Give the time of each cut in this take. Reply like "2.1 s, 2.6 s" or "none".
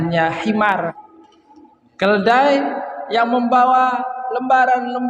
0.9 s